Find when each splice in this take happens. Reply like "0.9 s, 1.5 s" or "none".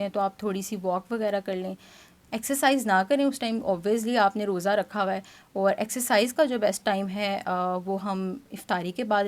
none